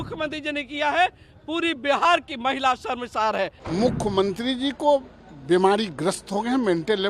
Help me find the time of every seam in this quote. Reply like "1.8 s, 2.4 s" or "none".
3.6 s